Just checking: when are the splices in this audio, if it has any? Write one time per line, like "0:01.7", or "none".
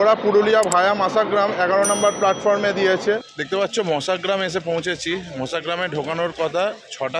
0:03.3